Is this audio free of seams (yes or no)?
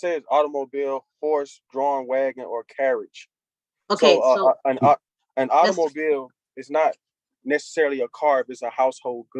yes